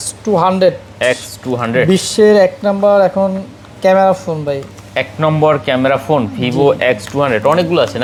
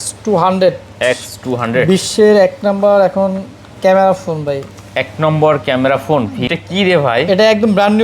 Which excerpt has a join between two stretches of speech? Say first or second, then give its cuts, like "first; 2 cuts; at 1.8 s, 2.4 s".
second; 1 cut; at 6.4 s